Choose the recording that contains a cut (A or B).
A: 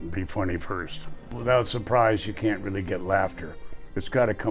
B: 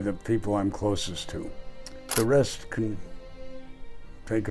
A